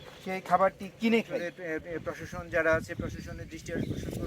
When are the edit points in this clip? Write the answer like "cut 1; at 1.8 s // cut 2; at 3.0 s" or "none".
cut 1; at 1.3 s